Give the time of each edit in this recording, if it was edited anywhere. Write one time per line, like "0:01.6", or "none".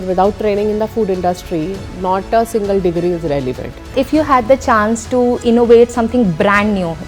0:03.9
0:05.4